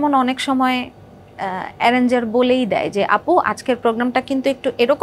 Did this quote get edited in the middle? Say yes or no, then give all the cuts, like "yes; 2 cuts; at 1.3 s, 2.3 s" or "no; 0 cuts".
no; 0 cuts